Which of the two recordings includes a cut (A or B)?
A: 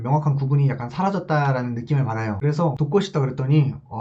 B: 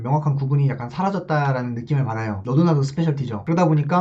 A